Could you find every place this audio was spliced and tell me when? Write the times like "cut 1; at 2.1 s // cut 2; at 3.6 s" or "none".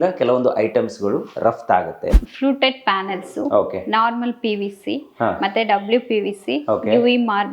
cut 1; at 2.1 s